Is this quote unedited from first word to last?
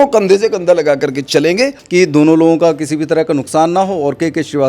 no; 1 cut; at 1.8 s

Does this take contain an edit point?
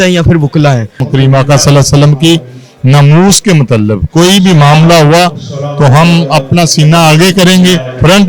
yes; 1 cut; at 1.0 s

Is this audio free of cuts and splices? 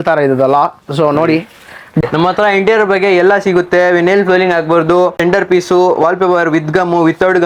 no; 2 cuts; at 2.0 s, 5.2 s

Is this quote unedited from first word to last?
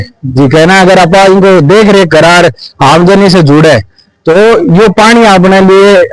yes; 0 cuts

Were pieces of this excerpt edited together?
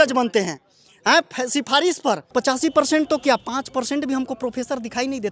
yes; 1 cut; at 2.2 s

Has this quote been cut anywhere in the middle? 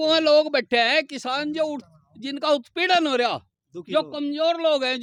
no; 0 cuts

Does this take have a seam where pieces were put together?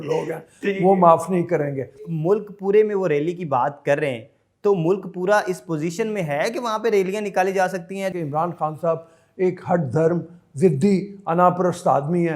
yes; 2 cuts; at 2.1 s, 8.1 s

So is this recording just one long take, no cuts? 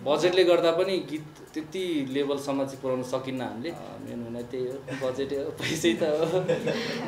no; 1 cut; at 3.9 s

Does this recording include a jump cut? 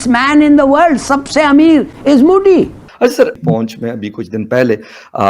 yes; 2 cuts; at 1.9 s, 2.8 s

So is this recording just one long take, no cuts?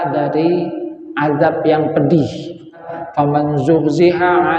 no; 1 cut; at 2.9 s

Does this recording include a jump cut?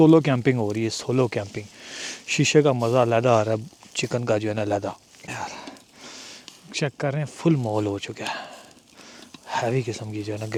no; 0 cuts

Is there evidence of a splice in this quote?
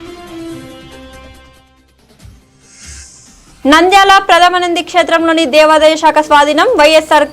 no; 0 cuts

